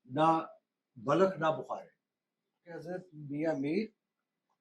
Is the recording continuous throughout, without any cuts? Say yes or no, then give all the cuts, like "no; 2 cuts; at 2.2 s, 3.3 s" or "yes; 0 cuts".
no; 1 cut; at 2.8 s